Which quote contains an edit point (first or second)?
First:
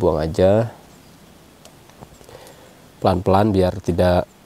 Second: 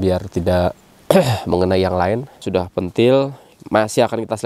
second